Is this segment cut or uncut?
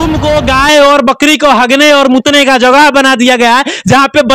uncut